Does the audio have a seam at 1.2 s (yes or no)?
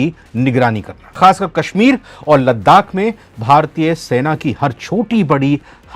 yes